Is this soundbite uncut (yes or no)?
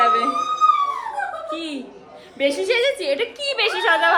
yes